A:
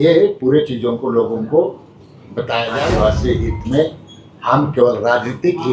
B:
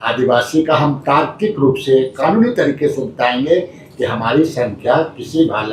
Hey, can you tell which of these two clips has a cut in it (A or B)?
A